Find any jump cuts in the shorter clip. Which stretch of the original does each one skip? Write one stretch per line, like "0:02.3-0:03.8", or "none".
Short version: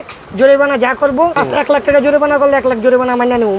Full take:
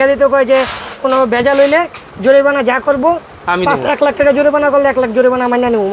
0:03.3-0:03.7